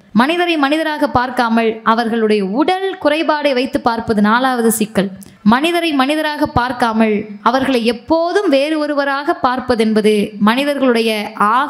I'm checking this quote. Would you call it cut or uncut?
cut